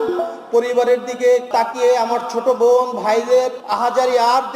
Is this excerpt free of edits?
no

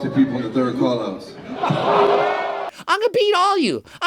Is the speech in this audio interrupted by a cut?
yes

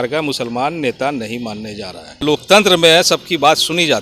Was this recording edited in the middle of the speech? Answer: yes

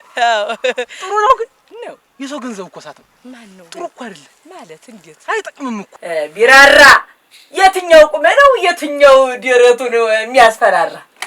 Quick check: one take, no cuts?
no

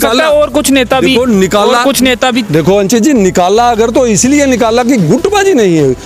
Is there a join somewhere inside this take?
no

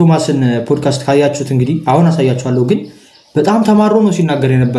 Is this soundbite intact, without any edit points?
yes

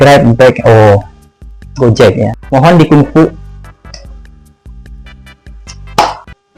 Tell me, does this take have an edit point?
no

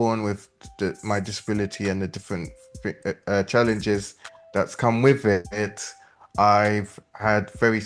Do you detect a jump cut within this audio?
no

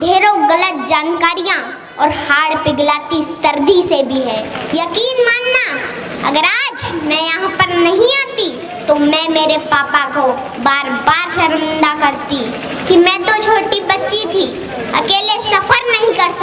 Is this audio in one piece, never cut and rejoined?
no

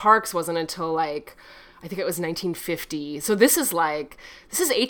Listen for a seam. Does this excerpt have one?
no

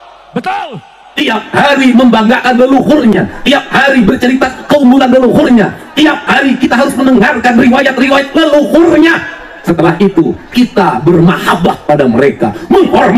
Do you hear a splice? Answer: yes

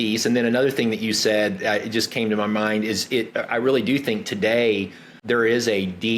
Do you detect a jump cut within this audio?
yes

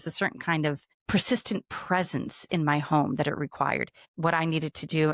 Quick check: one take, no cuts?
no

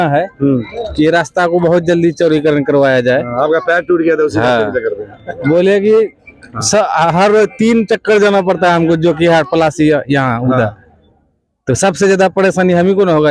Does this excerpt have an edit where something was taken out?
no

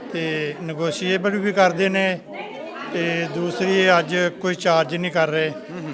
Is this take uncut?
yes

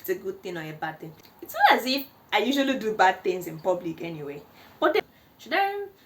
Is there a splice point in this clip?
yes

